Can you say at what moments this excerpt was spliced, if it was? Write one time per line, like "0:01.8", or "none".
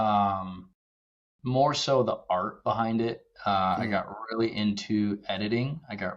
none

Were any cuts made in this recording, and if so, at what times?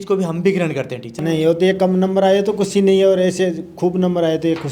0:01.2

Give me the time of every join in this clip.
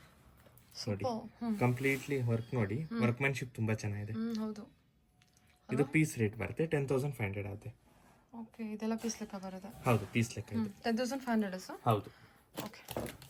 none

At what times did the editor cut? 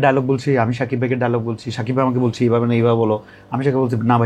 none

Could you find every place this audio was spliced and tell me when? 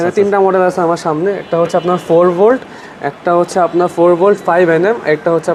none

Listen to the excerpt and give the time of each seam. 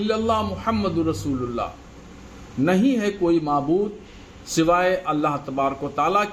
none

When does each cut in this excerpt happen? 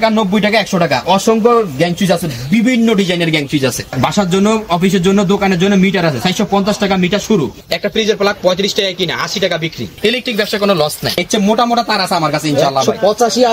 0:03.9
0:07.6
0:10.0
0:11.2

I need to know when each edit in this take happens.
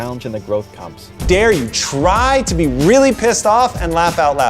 0:01.2

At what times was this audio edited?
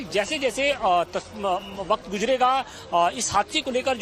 none

